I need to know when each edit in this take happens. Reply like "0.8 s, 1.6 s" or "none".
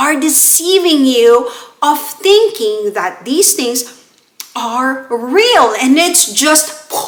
none